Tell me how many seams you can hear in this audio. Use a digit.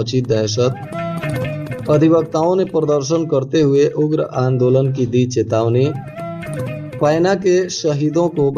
0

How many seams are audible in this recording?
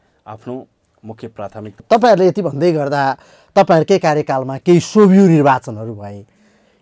1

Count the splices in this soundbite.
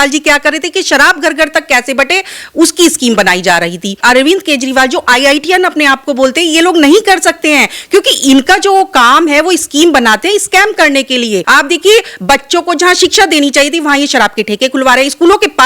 2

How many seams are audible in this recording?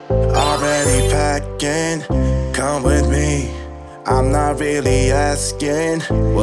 0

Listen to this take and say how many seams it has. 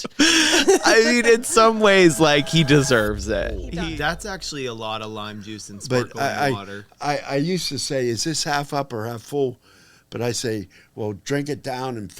1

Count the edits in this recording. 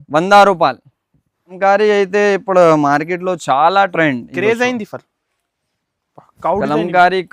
1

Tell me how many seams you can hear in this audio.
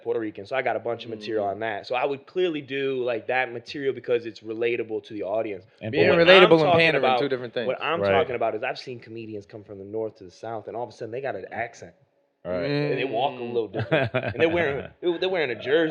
0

